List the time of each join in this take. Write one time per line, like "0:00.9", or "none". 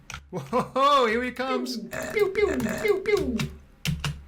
none

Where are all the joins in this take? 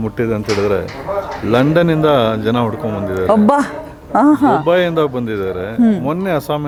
none

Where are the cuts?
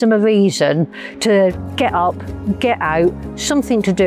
none

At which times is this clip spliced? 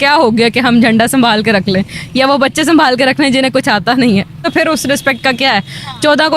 0:04.4

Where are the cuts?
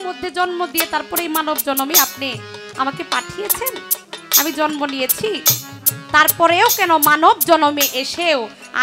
none

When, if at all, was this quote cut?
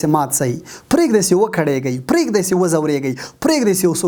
none

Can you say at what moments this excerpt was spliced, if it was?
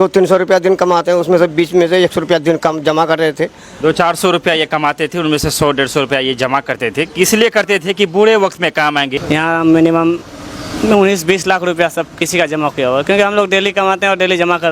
0:09.1

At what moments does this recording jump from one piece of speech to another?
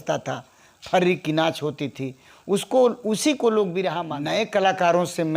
0:04.1

